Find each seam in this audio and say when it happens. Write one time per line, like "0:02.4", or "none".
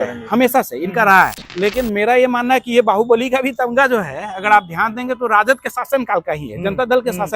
0:01.4